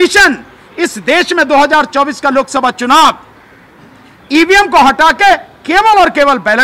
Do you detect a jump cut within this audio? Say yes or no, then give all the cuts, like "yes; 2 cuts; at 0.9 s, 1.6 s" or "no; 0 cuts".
no; 0 cuts